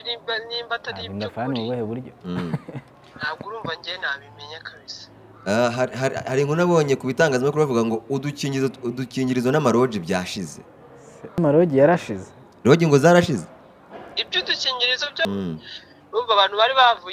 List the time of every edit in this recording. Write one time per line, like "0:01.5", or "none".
0:11.4
0:15.2